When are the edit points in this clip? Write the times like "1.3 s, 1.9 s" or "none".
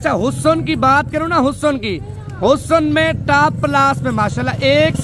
none